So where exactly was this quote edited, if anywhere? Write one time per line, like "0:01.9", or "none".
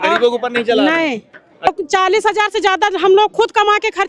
0:01.7